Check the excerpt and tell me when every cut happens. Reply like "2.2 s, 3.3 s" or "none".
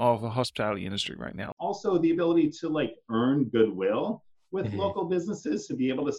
1.5 s